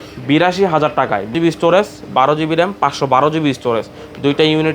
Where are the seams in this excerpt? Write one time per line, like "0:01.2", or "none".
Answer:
0:01.3